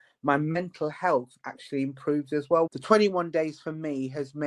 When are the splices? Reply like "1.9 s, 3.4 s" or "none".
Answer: 2.8 s